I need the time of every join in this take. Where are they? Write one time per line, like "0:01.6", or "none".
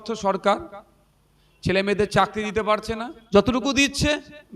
0:03.1